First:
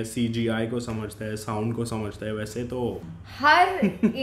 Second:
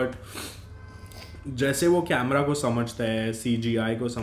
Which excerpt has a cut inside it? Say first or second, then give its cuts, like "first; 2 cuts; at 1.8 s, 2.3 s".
first; 1 cut; at 3.1 s